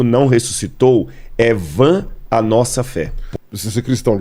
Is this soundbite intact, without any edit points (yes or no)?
no